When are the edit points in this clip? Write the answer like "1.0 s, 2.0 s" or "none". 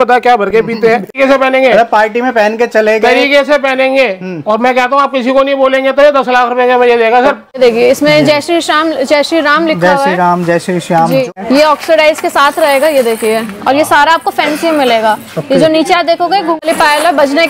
1.1 s, 7.6 s, 11.3 s, 16.6 s

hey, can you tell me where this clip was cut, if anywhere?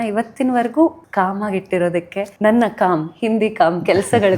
1.0 s, 2.2 s

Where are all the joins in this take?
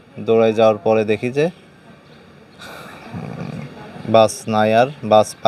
none

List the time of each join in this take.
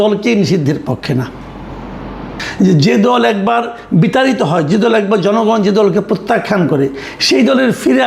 2.3 s

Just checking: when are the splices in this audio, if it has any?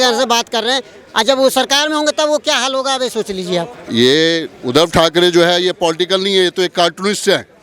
3.8 s

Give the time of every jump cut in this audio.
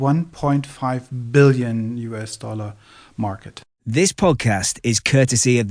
3.6 s

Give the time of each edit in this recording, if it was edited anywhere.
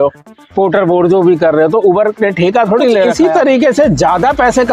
3.1 s

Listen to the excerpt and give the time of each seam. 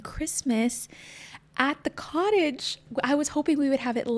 2.8 s

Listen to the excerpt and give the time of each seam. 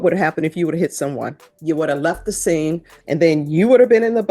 1.5 s, 2.9 s

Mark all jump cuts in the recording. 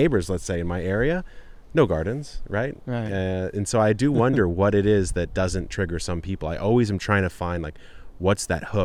none

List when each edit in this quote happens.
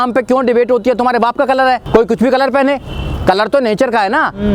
1.8 s

